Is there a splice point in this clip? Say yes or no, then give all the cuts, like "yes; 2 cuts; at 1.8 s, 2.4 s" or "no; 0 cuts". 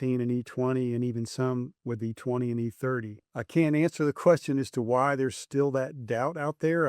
yes; 1 cut; at 3.3 s